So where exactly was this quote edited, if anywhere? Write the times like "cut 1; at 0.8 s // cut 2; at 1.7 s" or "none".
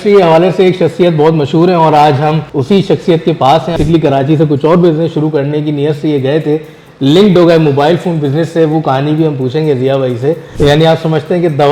cut 1; at 2.5 s // cut 2; at 3.8 s // cut 3; at 10.5 s